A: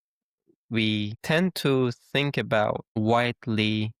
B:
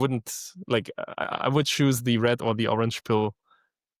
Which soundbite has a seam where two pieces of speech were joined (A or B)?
A